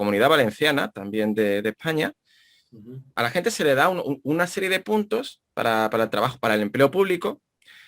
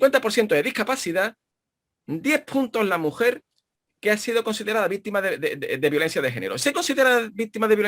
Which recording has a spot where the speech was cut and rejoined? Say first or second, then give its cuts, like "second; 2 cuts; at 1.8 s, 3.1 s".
first; 1 cut; at 3.1 s